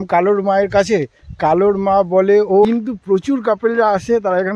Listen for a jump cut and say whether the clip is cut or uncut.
cut